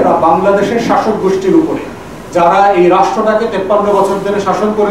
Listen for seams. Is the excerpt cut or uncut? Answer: uncut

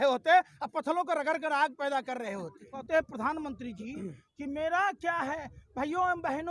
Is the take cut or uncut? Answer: cut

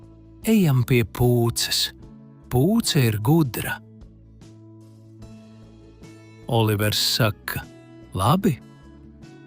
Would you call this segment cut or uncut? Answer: cut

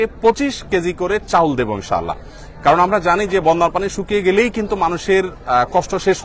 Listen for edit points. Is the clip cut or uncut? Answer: uncut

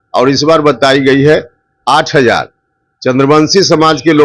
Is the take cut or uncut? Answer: uncut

